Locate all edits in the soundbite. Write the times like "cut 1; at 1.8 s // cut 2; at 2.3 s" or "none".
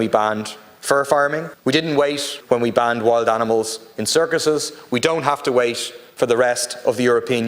cut 1; at 1.5 s // cut 2; at 2.3 s